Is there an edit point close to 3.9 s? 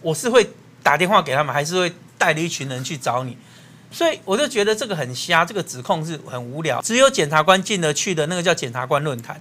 no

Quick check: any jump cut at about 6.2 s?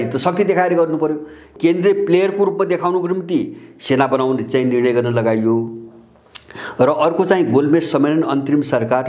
no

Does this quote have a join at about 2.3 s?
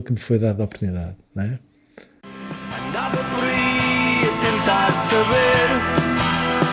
yes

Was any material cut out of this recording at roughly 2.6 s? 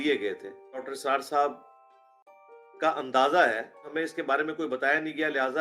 no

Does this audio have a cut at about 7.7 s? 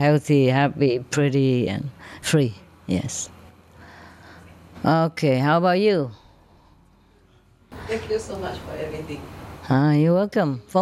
yes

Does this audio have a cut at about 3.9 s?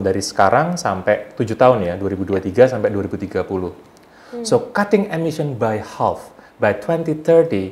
yes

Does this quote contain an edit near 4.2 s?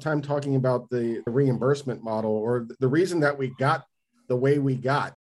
no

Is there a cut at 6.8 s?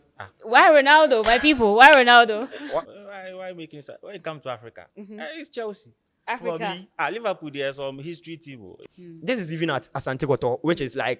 no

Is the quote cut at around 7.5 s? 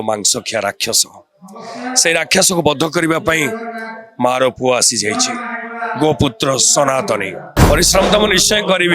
yes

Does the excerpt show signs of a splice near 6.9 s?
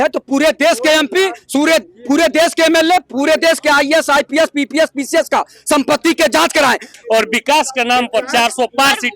yes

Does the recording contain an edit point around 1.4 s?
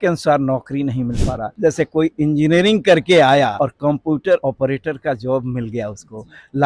yes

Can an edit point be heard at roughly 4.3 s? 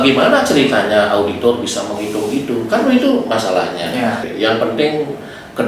yes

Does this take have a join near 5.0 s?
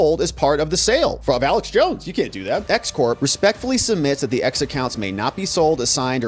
no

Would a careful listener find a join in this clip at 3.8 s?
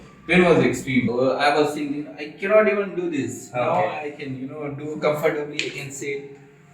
no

